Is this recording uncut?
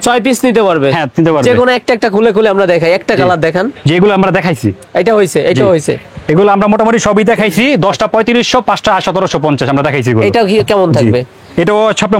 yes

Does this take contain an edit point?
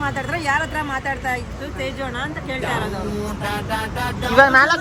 no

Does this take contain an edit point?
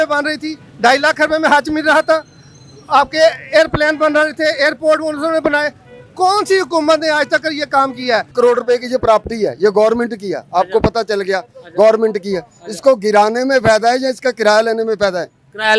yes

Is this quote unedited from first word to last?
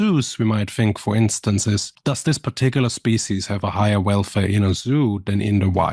no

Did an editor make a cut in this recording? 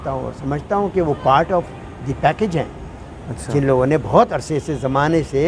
no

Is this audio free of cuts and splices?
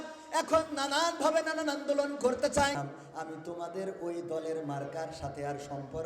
no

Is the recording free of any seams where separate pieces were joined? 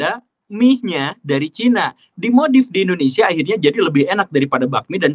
yes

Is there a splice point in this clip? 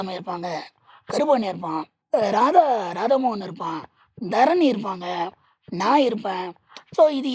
yes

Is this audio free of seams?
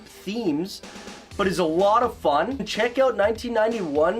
no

